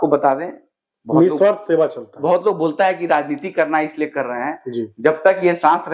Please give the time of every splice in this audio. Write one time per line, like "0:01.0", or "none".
none